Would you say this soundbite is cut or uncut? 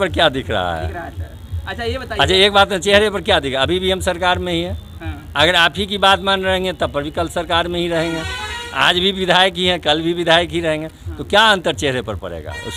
uncut